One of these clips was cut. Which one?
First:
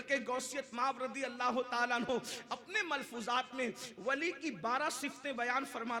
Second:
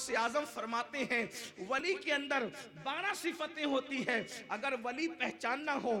second; 1 cut; at 1.8 s

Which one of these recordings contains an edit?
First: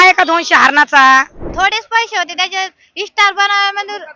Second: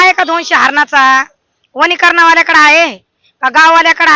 first; 1 cut; at 1.4 s

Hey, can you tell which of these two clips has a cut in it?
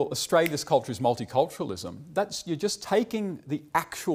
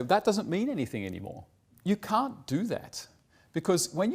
second; 1 cut; at 1.7 s

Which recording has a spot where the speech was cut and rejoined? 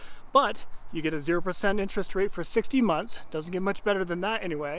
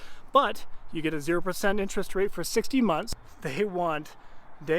second; 1 cut; at 3.2 s

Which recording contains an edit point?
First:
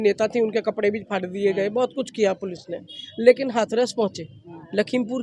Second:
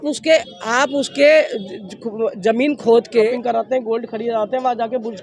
second; 1 cut; at 3.3 s

